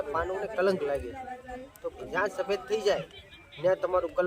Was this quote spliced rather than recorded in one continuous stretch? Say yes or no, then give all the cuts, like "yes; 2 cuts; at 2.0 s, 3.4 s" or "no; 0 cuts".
yes; 1 cut; at 2.0 s